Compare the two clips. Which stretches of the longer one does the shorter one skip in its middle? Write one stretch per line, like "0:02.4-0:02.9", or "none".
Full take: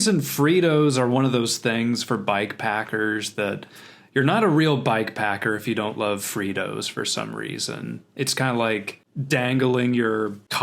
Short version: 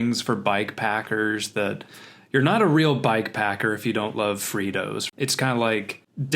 0:06.9-0:08.1

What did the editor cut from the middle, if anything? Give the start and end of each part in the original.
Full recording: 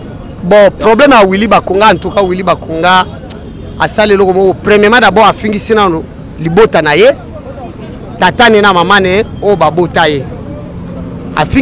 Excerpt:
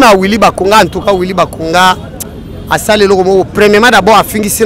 none

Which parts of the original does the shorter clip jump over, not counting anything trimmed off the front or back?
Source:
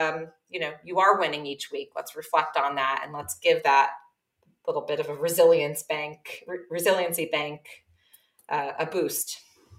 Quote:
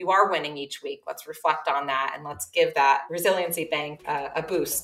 0:04.0-0:06.7
0:07.6-0:08.4

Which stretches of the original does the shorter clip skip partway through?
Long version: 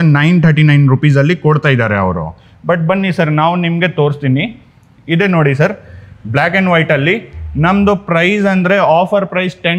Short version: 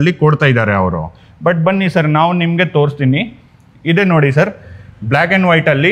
none

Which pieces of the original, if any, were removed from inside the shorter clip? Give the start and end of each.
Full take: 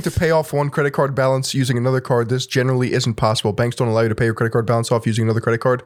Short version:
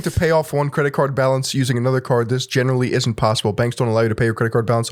none

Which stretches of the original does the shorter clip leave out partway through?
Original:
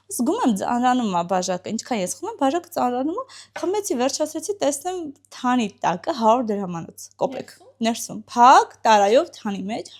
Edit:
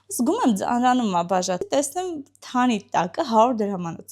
0:01.6-0:04.5

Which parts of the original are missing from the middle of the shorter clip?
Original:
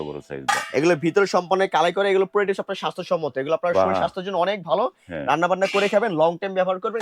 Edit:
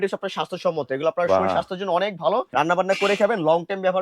0:04.9-0:05.2

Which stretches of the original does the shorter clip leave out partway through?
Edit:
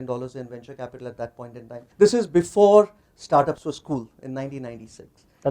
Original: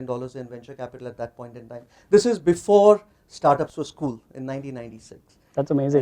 0:01.8-0:02.0

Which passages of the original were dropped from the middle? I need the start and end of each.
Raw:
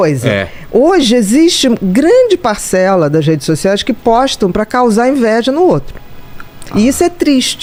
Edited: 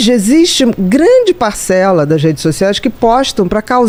none

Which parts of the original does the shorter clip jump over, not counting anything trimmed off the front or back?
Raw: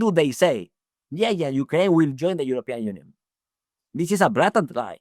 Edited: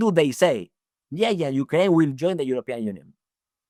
none

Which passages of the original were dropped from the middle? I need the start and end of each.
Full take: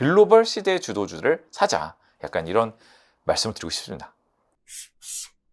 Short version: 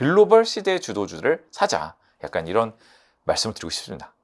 none

